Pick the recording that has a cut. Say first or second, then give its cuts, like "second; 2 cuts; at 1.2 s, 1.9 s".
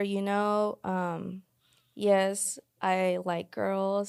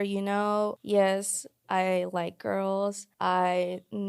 second; 2 cuts; at 0.8 s, 3.1 s